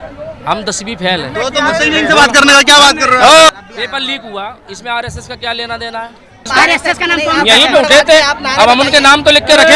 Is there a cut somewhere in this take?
yes; 2 cuts; at 3.5 s, 6.5 s

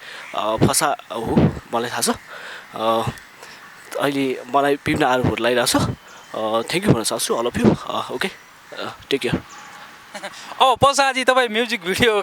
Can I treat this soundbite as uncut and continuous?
yes; 0 cuts

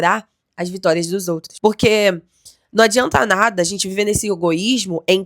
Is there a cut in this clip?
yes; 1 cut; at 1.5 s

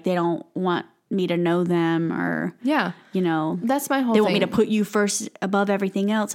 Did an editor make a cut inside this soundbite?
no; 0 cuts

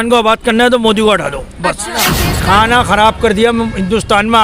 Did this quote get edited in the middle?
yes; 1 cut; at 2.2 s

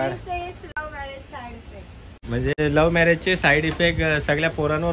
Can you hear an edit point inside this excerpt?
yes; 1 cut; at 2.6 s

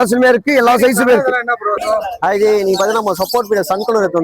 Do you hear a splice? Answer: yes; 1 cut; at 1.7 s

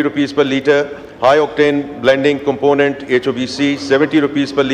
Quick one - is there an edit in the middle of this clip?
no; 0 cuts

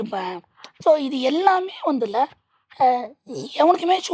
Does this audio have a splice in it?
no; 0 cuts

